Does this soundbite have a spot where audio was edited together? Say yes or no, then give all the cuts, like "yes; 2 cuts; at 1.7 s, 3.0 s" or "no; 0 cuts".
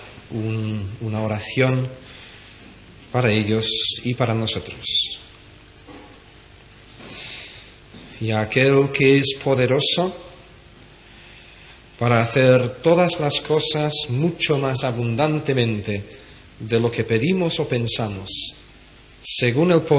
no; 0 cuts